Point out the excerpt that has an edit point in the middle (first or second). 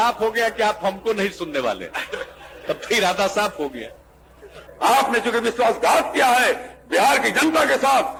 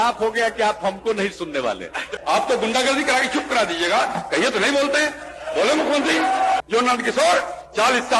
second